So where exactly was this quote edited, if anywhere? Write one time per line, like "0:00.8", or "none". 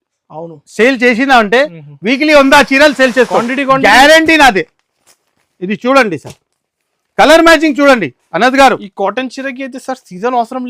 none